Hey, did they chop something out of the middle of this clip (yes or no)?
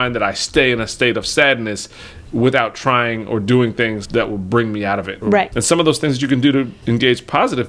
no